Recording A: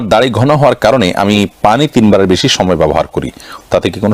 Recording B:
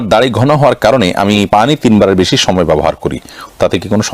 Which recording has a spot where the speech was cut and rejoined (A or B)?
B